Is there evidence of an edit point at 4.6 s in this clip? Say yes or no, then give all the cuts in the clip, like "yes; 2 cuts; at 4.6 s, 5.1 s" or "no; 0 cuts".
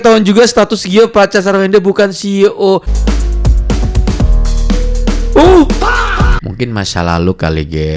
no; 2 cuts; at 2.9 s, 6.4 s